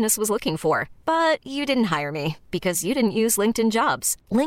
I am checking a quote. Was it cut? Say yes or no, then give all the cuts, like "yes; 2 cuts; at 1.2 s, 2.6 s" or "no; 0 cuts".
no; 0 cuts